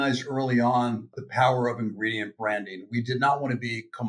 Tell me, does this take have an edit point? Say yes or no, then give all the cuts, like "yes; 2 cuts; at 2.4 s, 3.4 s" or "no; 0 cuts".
yes; 1 cut; at 1.1 s